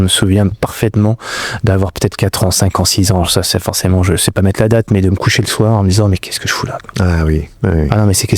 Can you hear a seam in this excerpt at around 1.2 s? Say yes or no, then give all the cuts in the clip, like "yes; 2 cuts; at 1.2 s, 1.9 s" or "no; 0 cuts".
no; 0 cuts